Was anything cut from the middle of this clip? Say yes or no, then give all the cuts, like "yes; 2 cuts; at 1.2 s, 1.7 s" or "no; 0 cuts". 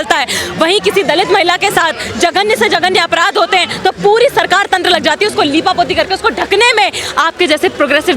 no; 0 cuts